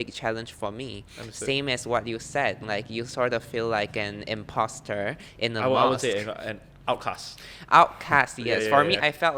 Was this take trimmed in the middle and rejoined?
no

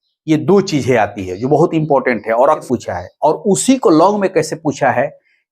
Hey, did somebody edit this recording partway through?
yes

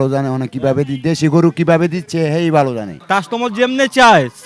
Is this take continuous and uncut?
no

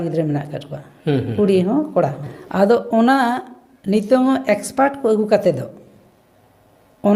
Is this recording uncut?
yes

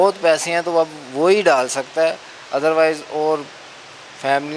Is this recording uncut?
yes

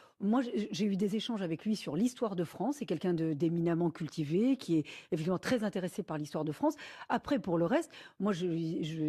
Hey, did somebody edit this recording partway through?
yes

